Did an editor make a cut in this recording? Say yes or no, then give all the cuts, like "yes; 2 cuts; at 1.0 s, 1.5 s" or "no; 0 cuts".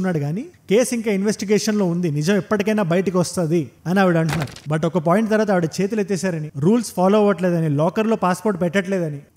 yes; 1 cut; at 4.6 s